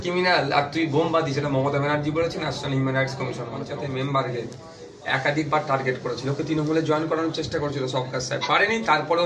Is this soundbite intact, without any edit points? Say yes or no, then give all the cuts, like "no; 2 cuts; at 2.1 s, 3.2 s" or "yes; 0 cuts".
no; 1 cut; at 3.6 s